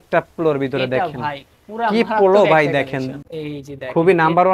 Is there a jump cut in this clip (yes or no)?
yes